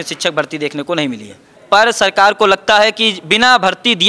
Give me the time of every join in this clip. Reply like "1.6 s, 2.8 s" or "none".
1.5 s